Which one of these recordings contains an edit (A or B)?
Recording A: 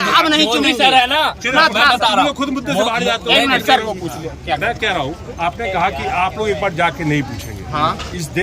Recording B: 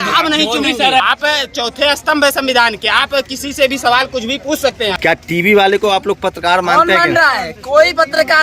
B